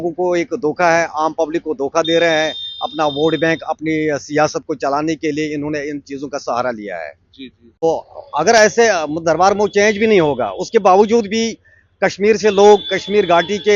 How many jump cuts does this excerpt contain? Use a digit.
1